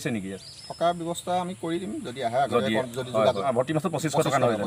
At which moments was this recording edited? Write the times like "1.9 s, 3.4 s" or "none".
3.4 s

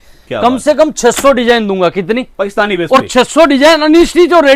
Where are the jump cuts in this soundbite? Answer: none

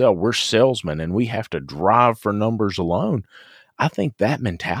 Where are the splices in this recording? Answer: none

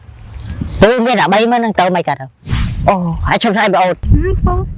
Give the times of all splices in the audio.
2.3 s

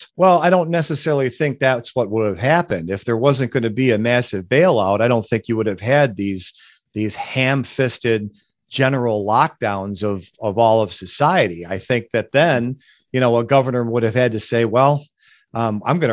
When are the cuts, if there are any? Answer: none

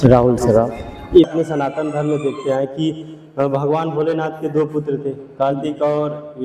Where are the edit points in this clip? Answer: 1.3 s

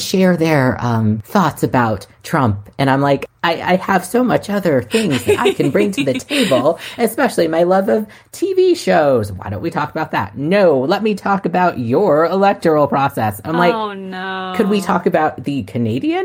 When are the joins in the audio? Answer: 1.2 s, 3.3 s

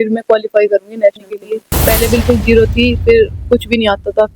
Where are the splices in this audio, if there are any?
1.7 s

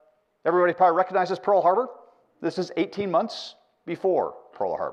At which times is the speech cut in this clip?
none

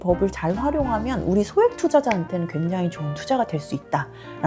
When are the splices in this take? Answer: none

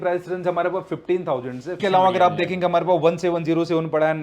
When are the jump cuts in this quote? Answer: 1.8 s

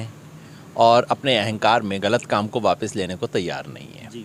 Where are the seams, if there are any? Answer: none

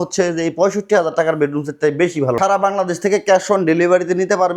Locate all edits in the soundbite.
2.4 s

